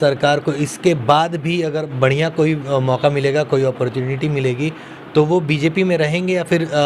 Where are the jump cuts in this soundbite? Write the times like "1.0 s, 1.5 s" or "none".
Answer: none